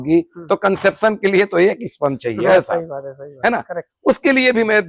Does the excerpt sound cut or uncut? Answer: uncut